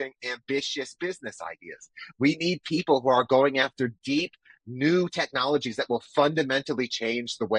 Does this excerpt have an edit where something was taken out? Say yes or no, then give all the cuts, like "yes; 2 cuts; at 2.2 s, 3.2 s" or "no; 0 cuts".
no; 0 cuts